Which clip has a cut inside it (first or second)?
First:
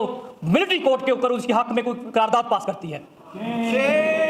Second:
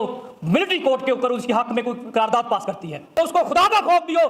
second